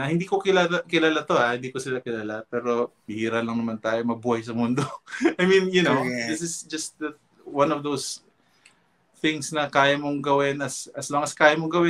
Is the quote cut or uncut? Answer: cut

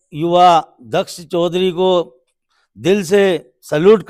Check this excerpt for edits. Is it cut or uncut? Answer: uncut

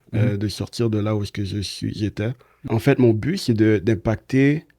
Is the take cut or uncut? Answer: cut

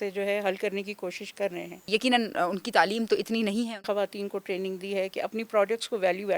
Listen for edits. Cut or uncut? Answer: cut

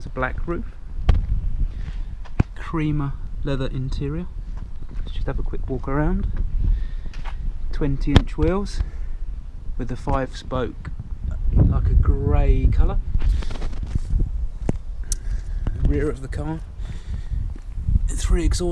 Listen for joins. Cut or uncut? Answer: uncut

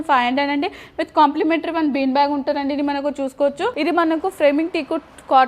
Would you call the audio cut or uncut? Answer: cut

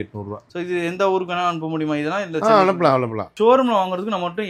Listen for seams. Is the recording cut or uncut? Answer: cut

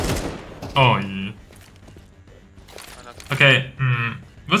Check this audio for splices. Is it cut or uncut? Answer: uncut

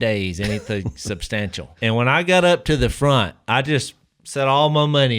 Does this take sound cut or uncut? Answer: cut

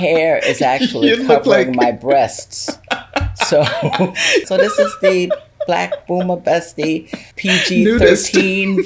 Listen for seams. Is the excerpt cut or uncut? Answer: cut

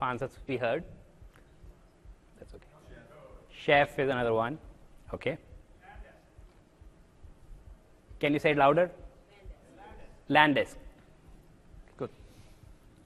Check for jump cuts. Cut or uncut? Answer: uncut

